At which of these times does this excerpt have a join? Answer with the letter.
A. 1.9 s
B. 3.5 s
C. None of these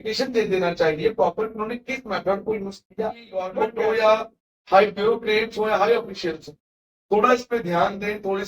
B